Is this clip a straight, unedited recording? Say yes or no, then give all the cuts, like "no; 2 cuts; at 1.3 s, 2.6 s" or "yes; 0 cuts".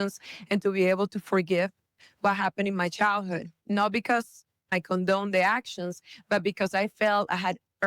no; 2 cuts; at 3.5 s, 4.7 s